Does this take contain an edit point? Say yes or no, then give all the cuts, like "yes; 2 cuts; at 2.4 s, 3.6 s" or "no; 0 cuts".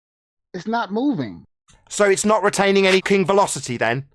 yes; 1 cut; at 3.0 s